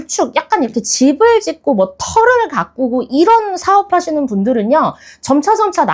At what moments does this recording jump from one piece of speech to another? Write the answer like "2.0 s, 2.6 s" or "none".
none